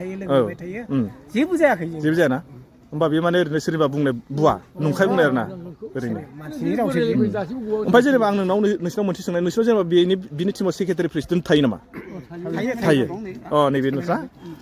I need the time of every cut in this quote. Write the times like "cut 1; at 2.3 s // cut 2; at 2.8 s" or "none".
none